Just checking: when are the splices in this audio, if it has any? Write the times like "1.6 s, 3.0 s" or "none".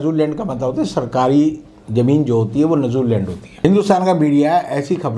3.6 s